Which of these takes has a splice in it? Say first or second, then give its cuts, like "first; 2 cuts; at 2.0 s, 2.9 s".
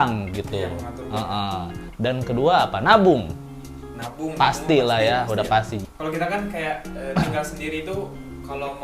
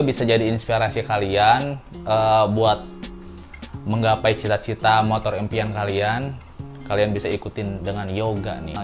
first; 1 cut; at 5.7 s